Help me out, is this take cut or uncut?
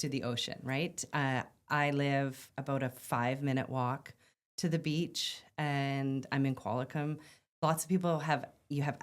uncut